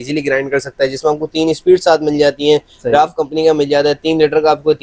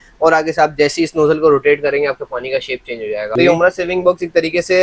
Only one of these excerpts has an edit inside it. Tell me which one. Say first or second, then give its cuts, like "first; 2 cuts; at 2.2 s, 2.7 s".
second; 1 cut; at 3.3 s